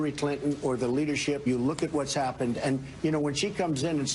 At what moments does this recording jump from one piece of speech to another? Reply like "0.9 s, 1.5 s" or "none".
1.4 s